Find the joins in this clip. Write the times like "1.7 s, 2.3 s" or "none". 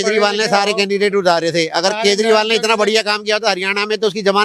none